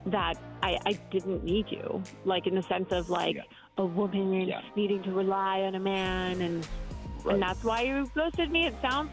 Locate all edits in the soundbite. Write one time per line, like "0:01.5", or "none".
none